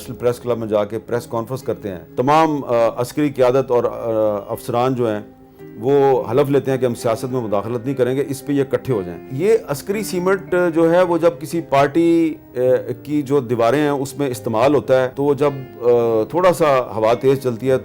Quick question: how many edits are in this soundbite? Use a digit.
4